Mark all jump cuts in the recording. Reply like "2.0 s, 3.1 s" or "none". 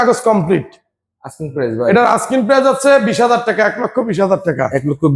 none